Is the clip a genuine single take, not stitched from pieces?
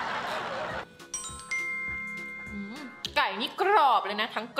no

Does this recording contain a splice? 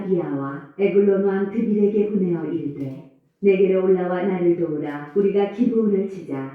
yes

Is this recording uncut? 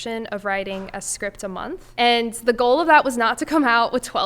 no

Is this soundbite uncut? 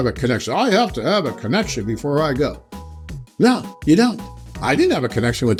yes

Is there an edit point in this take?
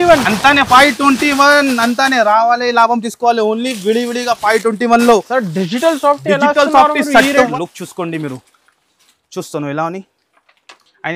yes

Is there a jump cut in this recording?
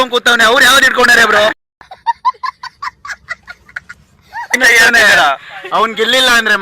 yes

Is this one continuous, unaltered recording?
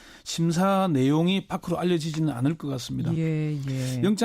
no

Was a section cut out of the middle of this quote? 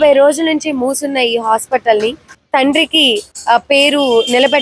yes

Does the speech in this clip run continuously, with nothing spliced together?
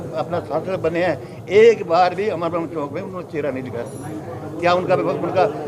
yes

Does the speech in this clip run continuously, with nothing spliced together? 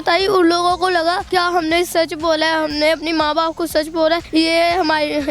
no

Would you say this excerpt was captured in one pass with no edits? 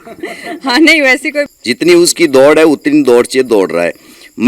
no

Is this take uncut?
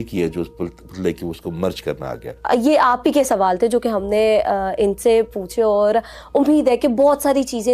no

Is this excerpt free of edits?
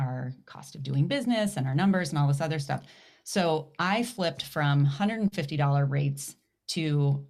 yes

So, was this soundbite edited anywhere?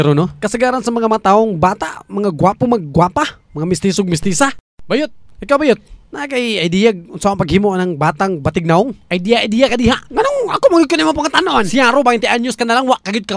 no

